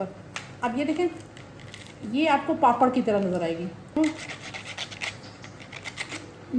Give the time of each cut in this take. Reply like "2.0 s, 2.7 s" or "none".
4.0 s